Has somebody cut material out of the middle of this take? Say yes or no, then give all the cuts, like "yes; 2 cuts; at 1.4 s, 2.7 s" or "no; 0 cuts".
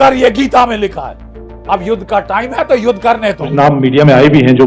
yes; 1 cut; at 3.5 s